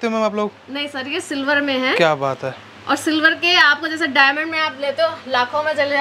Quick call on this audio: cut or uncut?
uncut